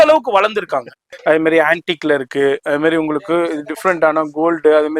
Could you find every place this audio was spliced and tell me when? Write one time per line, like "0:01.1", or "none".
0:01.1